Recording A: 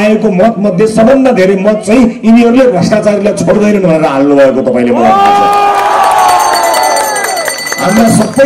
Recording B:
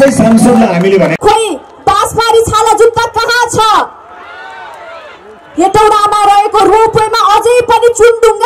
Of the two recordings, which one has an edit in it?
B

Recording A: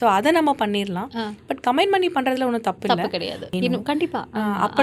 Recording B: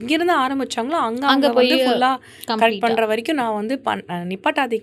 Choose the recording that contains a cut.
A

